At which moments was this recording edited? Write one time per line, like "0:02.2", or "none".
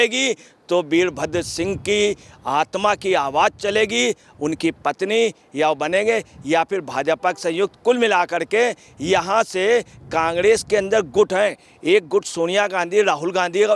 none